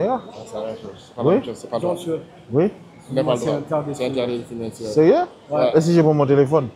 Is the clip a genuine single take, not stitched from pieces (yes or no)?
yes